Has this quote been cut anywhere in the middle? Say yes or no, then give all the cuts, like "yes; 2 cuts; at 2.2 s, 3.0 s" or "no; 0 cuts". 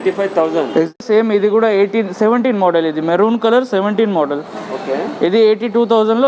yes; 1 cut; at 1.0 s